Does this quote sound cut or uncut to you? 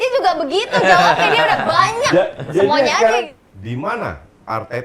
cut